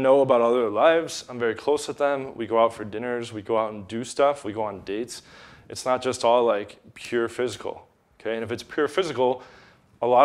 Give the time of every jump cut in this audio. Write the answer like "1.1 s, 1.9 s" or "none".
none